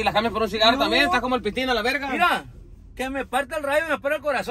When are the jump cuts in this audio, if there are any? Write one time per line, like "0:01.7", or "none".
none